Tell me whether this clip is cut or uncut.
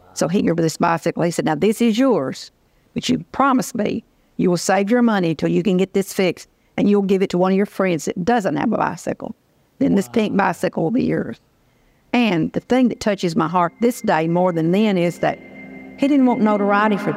uncut